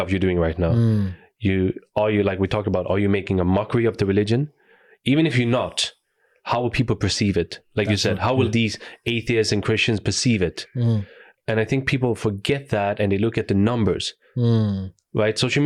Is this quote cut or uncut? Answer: uncut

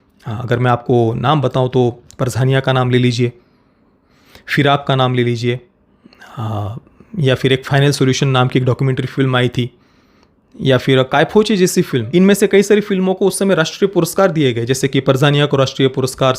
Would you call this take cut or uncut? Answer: cut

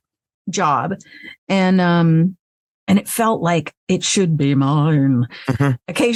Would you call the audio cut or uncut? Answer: uncut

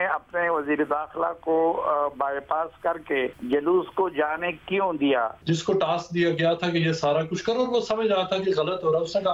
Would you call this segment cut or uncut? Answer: cut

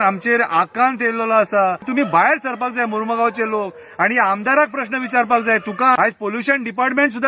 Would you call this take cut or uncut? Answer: cut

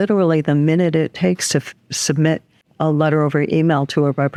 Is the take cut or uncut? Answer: uncut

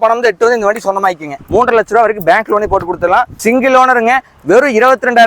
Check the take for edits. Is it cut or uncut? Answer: cut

